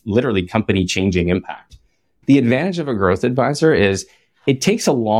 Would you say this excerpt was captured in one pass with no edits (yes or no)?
no